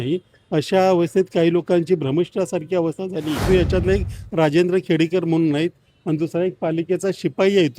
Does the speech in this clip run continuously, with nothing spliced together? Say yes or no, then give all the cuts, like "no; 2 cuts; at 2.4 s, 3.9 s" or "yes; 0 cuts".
no; 1 cut; at 3.4 s